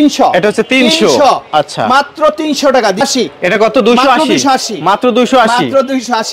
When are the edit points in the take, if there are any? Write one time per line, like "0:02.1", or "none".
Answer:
0:03.0